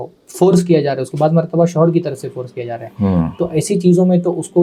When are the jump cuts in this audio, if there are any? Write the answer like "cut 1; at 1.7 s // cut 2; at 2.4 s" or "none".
none